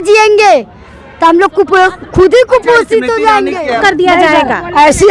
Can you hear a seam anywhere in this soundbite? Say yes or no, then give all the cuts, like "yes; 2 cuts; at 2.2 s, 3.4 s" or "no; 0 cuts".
yes; 1 cut; at 3.8 s